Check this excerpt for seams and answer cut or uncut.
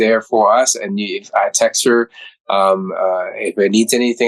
uncut